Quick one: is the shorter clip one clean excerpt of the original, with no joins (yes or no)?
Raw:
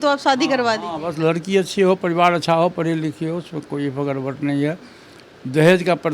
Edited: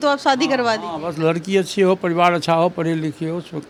yes